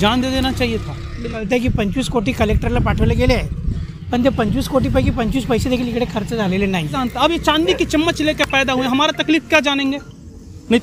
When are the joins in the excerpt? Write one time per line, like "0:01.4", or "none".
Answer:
0:01.4
0:07.0